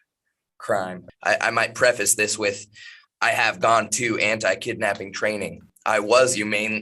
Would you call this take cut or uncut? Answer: cut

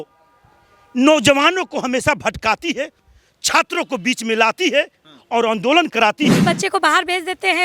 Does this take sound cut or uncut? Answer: cut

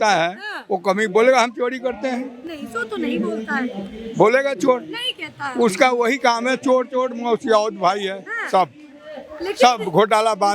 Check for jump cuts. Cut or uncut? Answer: uncut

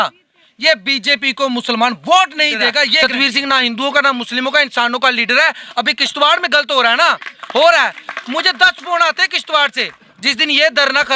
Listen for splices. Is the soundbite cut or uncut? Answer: cut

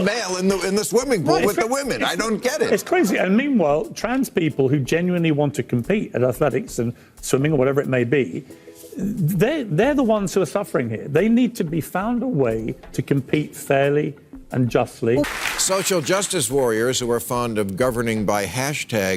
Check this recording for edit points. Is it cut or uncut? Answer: cut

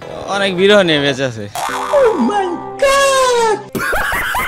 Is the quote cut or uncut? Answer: uncut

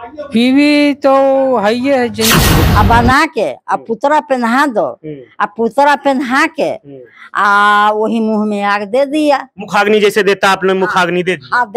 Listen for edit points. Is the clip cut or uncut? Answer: cut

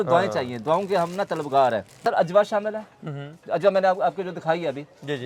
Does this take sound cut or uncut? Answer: cut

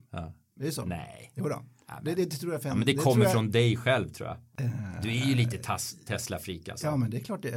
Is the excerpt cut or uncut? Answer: cut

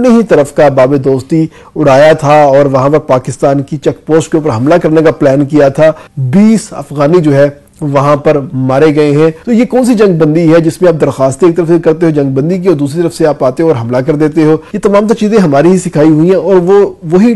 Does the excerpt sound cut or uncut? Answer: cut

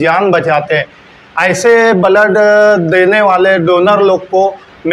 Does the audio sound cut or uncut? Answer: uncut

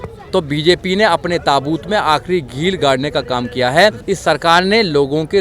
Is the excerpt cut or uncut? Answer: cut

